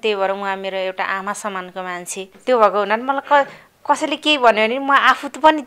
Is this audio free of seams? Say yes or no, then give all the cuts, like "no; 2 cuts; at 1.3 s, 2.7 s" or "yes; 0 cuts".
no; 1 cut; at 2.3 s